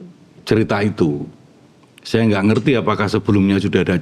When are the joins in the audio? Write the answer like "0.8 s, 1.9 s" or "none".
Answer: none

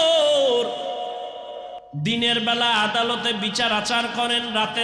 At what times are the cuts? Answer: 1.8 s

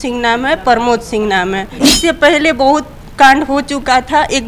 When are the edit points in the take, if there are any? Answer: 1.8 s

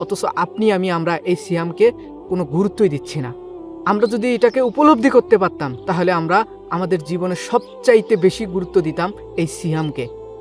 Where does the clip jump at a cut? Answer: none

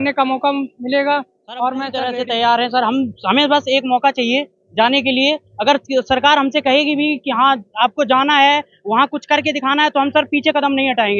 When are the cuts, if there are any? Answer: 2.0 s

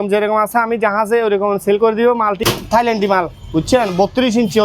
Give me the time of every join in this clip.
2.4 s

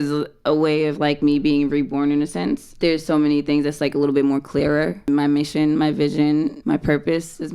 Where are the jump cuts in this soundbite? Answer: 2.7 s, 5.1 s, 6.6 s

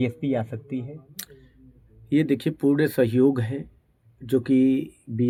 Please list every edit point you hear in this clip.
none

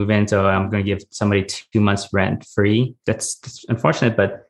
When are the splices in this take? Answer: 3.0 s

